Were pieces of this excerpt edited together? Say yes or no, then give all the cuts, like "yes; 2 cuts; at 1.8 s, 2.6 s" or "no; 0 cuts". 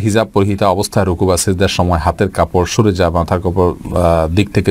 no; 0 cuts